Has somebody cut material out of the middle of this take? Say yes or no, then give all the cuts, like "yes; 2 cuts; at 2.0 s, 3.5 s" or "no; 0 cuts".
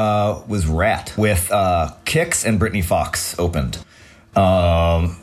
yes; 1 cut; at 1.2 s